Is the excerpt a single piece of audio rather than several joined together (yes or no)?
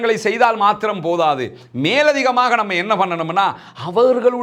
yes